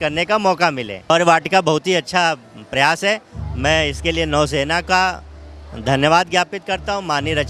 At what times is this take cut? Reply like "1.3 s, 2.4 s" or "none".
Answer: 1.1 s